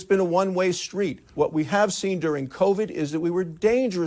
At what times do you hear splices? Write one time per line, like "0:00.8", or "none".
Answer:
0:01.2